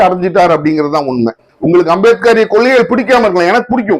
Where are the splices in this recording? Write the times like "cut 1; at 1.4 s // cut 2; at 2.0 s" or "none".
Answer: cut 1; at 1.5 s

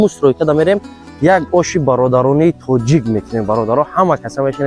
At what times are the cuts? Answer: none

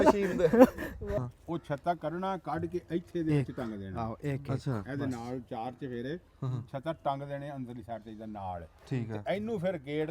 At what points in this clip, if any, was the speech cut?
cut 1; at 1.0 s

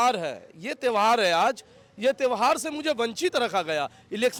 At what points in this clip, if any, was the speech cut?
none

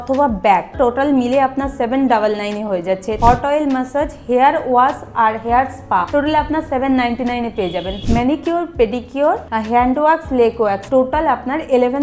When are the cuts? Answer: cut 1; at 0.7 s // cut 2; at 3.1 s // cut 3; at 6.1 s // cut 4; at 7.9 s // cut 5; at 9.5 s // cut 6; at 10.8 s

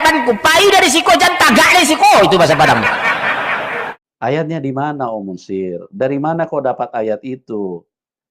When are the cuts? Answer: cut 1; at 4.0 s

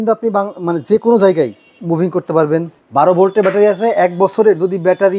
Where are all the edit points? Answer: cut 1; at 2.7 s

